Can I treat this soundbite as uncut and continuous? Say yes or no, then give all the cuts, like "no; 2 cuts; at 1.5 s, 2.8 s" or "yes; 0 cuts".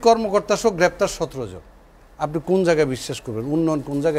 yes; 0 cuts